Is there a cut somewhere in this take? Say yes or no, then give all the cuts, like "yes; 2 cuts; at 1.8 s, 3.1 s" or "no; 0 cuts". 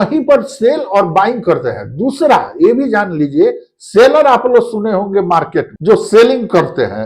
yes; 1 cut; at 5.7 s